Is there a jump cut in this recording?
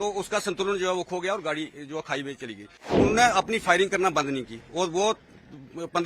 yes; 1 cut; at 2.9 s

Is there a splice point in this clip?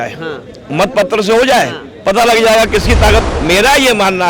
yes; 1 cut; at 3.3 s

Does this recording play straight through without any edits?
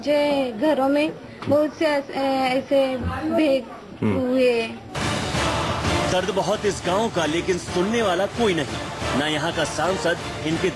yes; 0 cuts

